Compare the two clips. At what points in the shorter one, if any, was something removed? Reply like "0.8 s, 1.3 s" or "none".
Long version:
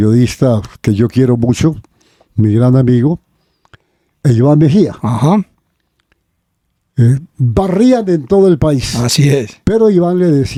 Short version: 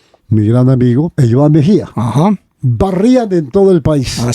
1.1 s, 2.6 s